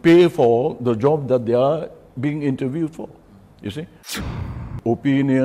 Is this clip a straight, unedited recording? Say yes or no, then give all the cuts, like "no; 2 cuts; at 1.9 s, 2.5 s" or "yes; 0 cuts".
no; 1 cut; at 4.4 s